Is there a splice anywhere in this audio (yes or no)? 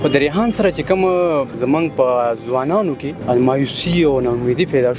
yes